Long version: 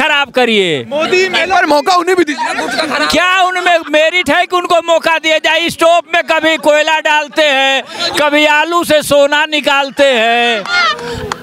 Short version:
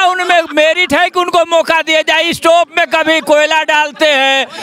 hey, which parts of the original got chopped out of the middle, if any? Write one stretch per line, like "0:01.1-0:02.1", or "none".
none